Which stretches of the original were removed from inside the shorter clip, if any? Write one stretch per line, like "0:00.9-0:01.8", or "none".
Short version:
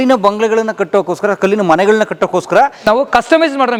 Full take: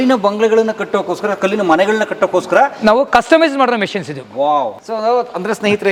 none